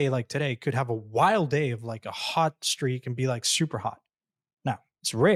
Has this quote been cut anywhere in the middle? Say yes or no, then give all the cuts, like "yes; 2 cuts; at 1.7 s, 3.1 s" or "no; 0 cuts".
no; 0 cuts